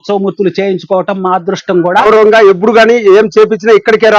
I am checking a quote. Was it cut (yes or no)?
yes